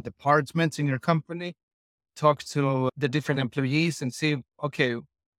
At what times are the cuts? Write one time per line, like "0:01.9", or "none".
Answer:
0:02.9